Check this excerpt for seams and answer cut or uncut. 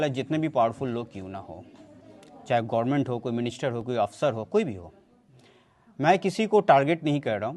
uncut